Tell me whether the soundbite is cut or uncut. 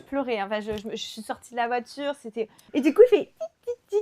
cut